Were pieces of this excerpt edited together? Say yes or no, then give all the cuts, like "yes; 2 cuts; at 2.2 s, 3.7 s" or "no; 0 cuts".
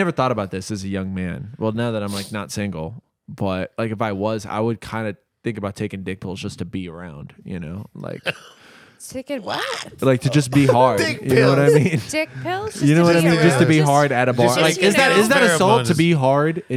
no; 0 cuts